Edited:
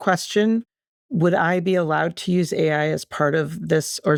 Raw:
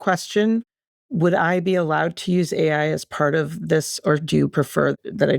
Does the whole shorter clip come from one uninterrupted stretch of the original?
yes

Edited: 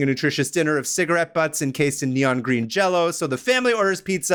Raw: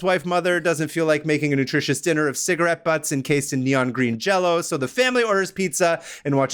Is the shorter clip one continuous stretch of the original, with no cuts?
yes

